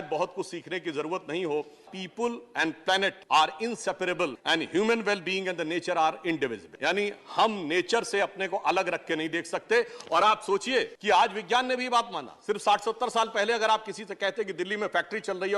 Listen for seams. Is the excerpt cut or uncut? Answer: cut